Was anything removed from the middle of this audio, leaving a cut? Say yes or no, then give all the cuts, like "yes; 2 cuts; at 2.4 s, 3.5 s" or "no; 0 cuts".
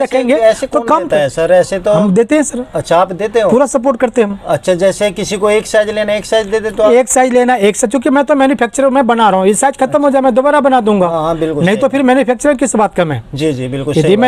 no; 0 cuts